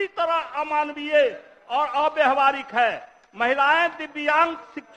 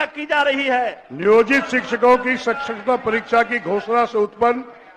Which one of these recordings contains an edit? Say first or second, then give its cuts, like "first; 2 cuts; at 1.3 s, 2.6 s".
second; 1 cut; at 1.0 s